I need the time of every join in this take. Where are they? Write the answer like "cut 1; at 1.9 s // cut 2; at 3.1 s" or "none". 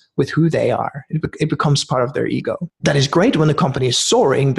cut 1; at 2.7 s